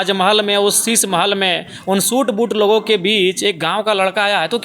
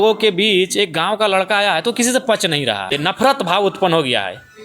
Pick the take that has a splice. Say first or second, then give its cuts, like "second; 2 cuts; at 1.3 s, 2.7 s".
second; 1 cut; at 3.0 s